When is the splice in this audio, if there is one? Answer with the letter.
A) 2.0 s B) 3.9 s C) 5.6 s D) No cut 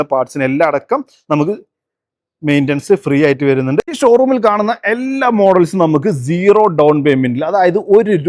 B